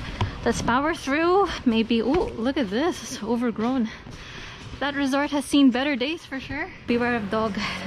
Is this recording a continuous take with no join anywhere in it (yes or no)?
no